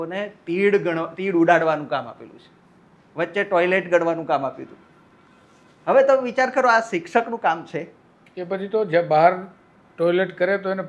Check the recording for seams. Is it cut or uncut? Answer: uncut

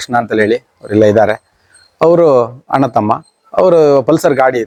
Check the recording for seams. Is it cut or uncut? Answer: uncut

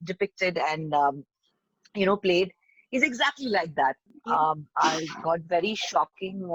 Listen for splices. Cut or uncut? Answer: cut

